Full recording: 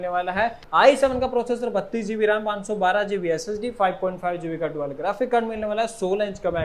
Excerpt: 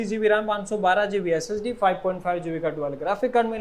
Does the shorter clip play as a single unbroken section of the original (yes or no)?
yes